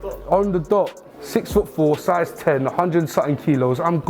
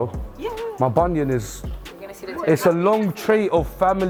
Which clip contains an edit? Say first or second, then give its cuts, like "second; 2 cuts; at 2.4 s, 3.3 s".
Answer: first; 1 cut; at 1.1 s